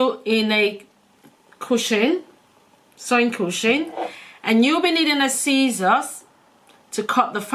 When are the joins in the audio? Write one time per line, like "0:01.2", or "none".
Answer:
none